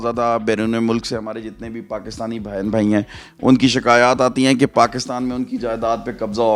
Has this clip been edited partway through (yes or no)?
no